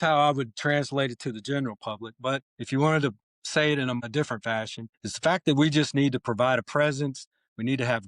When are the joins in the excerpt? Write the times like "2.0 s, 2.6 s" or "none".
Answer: 2.5 s, 4.4 s